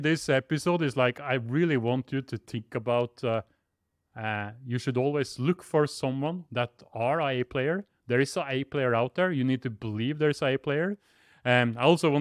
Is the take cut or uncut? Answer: uncut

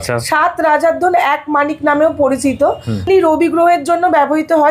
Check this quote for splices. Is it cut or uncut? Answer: cut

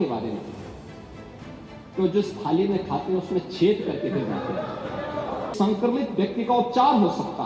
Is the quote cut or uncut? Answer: cut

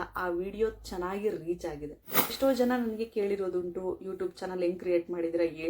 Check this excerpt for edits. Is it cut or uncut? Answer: cut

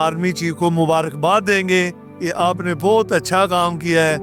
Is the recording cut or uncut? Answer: uncut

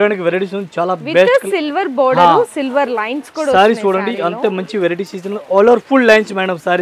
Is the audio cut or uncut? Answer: uncut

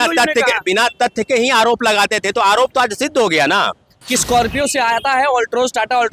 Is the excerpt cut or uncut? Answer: cut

